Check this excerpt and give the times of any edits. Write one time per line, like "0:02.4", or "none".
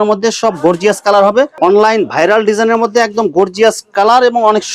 0:01.5

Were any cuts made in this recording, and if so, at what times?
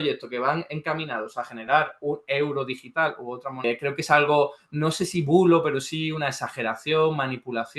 0:03.6

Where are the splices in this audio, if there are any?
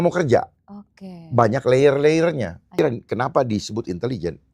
0:02.7

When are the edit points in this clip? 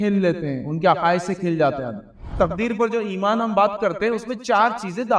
0:02.3

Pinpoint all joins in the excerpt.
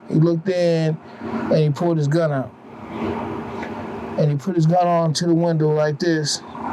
none

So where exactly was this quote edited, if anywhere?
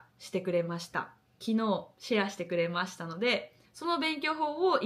none

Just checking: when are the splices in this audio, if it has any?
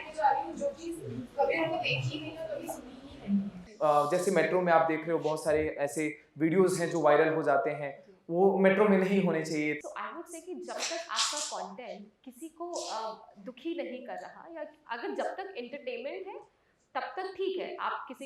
0:03.6
0:09.8

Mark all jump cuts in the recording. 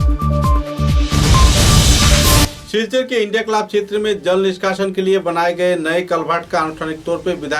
none

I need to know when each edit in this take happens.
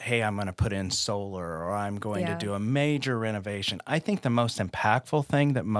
none

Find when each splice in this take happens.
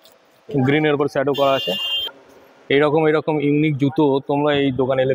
0:02.0

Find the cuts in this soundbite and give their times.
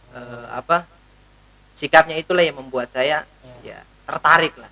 none

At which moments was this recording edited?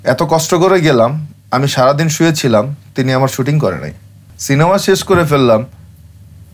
0:04.3

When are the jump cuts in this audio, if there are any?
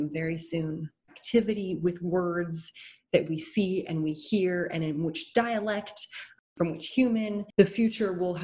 0:01.2

